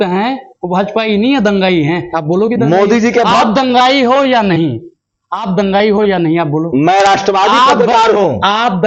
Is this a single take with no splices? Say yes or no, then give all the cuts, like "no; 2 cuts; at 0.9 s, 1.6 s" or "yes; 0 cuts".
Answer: yes; 0 cuts